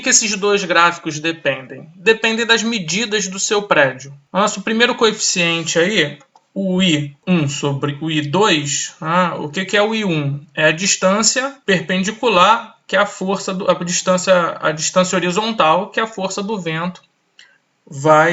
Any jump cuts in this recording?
yes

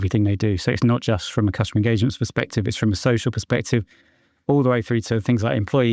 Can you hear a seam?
no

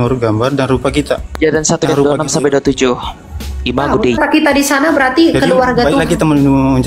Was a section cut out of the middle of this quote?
yes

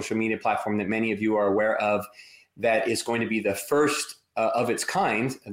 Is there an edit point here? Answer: no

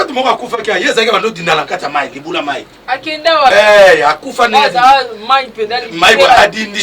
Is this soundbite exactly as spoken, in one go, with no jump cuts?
no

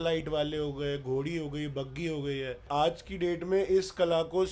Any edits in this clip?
yes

